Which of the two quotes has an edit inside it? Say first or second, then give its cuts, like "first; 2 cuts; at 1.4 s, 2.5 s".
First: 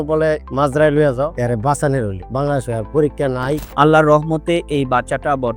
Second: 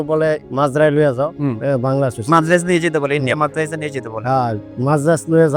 first; 2 cuts; at 1.3 s, 3.6 s